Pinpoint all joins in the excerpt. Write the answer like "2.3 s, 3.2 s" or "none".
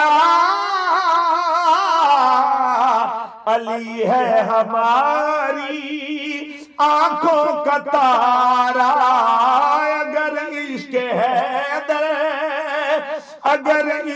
none